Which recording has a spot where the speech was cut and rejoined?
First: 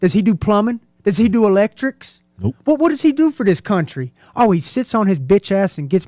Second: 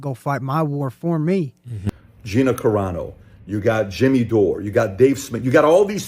second; 1 cut; at 1.8 s

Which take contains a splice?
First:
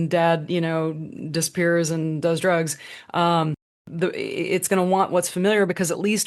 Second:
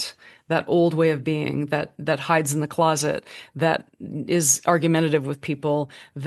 first; 1 cut; at 3.8 s

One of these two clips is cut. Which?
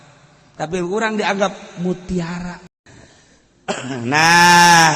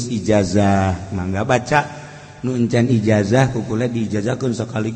first; 1 cut; at 2.6 s

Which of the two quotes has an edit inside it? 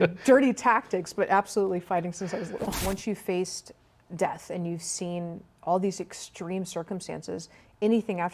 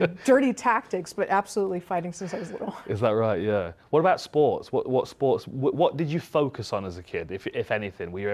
first; 1 cut; at 2.8 s

